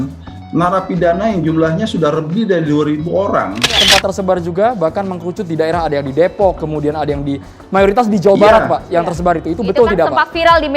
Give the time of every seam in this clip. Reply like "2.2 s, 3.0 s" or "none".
3.8 s